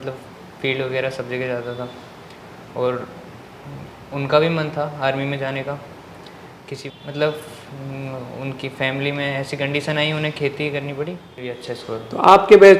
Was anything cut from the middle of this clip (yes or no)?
yes